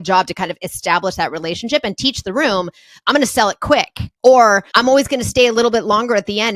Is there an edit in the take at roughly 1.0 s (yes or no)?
no